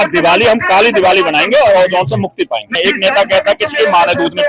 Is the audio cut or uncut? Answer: cut